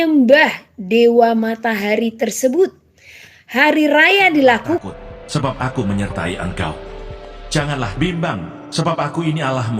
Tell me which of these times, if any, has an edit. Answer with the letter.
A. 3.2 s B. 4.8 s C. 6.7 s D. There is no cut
B